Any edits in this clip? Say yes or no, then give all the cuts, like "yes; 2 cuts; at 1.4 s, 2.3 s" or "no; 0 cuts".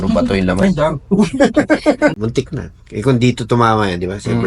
yes; 1 cut; at 2.1 s